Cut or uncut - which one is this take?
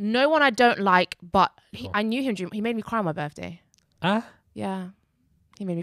cut